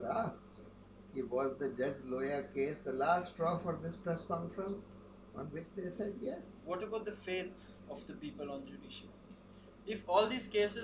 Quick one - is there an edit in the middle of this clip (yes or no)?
yes